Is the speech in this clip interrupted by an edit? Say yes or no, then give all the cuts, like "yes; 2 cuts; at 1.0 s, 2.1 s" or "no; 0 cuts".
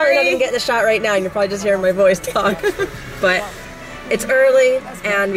no; 0 cuts